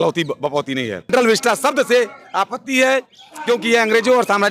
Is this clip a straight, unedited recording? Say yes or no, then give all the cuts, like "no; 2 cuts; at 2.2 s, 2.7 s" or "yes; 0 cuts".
no; 1 cut; at 1.1 s